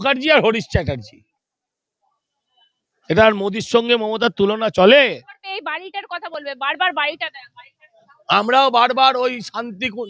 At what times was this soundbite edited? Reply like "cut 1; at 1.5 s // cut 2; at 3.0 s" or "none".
none